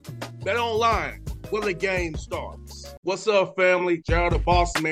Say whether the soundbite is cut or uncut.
uncut